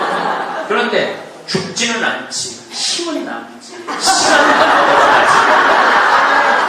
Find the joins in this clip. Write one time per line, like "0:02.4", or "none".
none

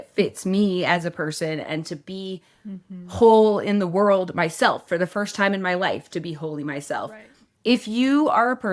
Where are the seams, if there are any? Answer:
0:07.5

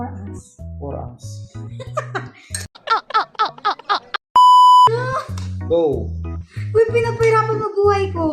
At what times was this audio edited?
0:04.9

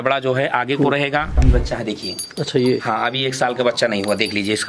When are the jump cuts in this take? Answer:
0:01.4

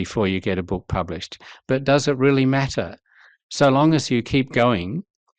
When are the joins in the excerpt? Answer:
none

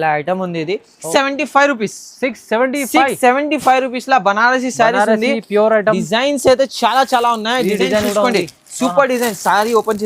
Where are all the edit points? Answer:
0:01.0

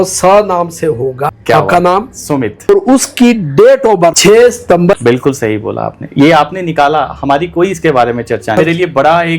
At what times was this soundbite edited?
0:01.3
0:02.7
0:04.2
0:05.0
0:08.6

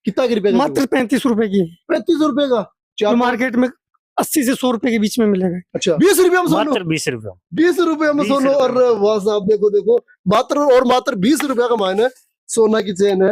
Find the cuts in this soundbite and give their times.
0:06.0

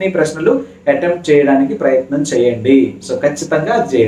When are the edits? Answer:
none

